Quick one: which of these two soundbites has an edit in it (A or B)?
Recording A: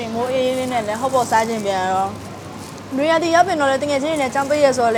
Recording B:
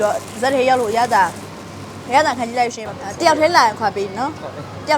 B